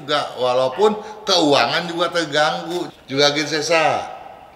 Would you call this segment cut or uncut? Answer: uncut